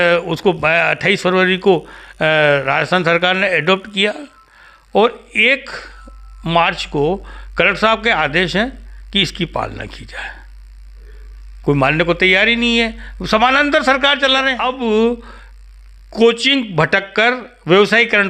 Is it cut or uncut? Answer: cut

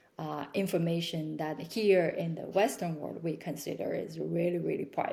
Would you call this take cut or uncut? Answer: uncut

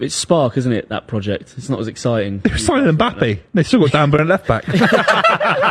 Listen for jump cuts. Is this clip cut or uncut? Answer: uncut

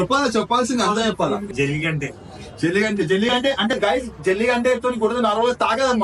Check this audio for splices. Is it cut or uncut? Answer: uncut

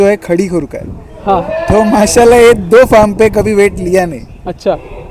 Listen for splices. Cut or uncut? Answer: uncut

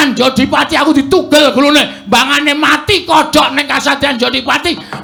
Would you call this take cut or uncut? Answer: uncut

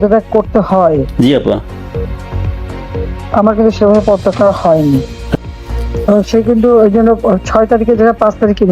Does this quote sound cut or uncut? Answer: cut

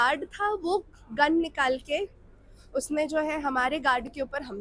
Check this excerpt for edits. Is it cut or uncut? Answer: uncut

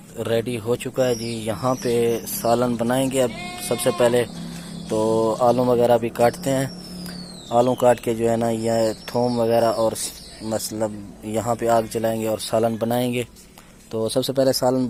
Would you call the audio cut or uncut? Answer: uncut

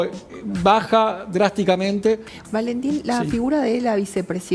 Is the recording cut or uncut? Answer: cut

